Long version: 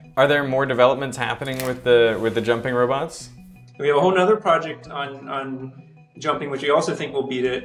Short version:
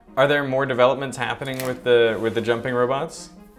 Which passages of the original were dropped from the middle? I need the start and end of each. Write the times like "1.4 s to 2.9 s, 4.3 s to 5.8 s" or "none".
none